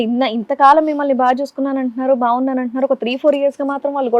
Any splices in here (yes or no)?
no